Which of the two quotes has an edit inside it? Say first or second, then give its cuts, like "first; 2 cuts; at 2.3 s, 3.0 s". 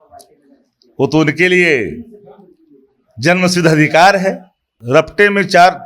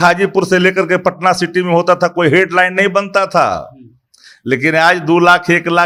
first; 1 cut; at 4.7 s